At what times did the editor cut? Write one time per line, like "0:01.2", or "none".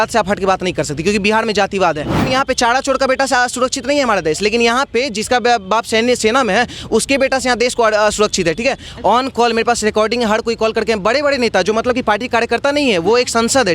0:02.2
0:08.9